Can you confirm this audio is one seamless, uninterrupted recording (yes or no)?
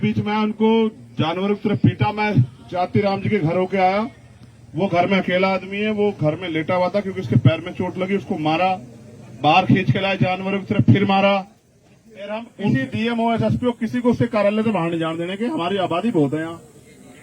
no